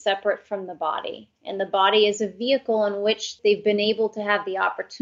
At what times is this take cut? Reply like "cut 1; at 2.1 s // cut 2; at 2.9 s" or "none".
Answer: cut 1; at 3.3 s